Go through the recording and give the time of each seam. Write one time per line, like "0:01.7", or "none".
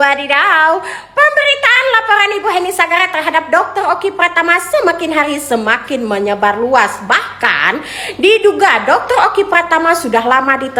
none